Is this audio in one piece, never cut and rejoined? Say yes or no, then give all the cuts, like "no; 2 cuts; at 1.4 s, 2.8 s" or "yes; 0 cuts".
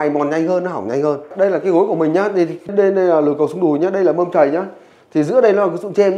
yes; 0 cuts